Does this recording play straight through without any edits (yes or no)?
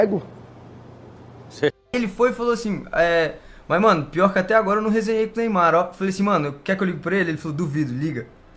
no